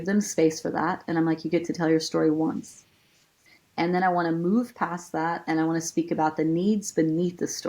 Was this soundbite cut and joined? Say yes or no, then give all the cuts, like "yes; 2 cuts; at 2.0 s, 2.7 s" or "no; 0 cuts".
yes; 1 cut; at 3.3 s